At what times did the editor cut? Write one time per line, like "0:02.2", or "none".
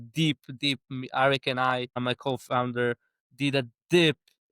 0:02.0